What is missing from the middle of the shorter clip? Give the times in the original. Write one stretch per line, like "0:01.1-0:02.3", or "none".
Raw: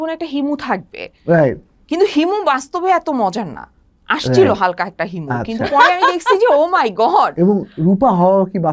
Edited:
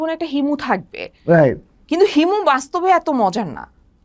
none